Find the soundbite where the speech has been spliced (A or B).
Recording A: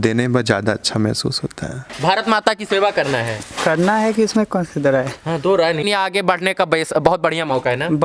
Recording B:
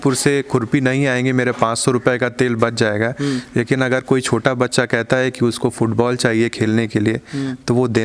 A